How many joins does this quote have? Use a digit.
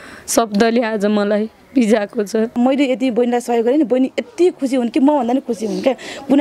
1